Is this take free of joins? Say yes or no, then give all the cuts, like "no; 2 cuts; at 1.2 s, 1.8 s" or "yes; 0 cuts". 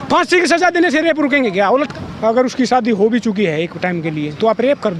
no; 1 cut; at 1.9 s